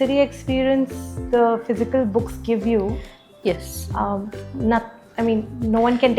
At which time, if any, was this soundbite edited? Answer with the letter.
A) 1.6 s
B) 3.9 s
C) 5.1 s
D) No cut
D